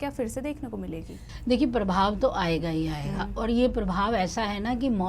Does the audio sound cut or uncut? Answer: uncut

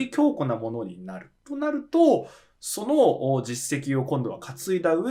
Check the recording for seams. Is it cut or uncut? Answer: uncut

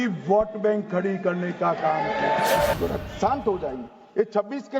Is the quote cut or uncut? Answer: cut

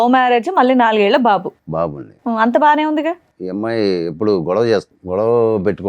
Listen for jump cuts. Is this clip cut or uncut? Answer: cut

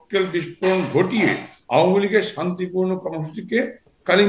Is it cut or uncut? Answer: uncut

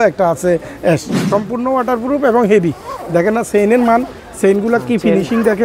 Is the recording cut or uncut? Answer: cut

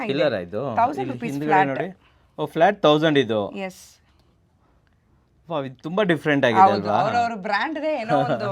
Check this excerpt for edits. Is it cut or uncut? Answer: uncut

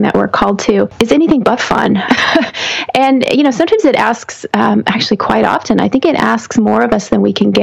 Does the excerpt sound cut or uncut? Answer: cut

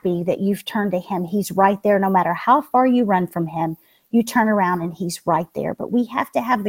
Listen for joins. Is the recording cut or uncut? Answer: uncut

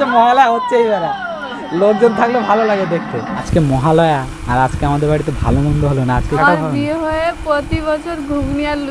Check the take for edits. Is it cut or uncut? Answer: cut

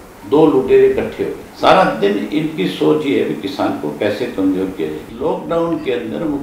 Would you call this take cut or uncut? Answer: cut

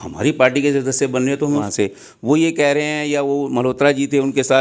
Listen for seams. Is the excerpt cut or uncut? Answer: cut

